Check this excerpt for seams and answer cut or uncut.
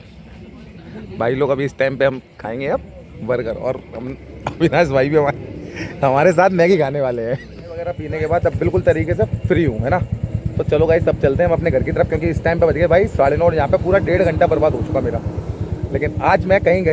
uncut